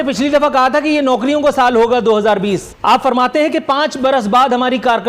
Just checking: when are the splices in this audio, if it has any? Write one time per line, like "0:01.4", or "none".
0:02.7